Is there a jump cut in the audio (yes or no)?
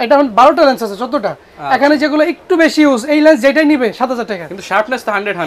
no